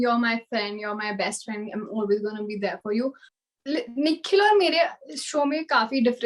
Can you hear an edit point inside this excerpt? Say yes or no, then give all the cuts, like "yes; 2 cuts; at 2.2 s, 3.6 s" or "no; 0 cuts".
yes; 1 cut; at 3.2 s